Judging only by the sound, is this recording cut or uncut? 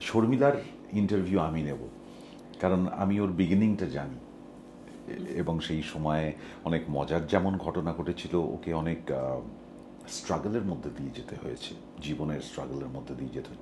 uncut